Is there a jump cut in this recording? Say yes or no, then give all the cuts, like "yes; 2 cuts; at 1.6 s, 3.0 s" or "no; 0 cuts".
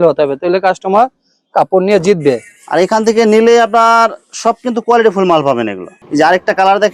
no; 0 cuts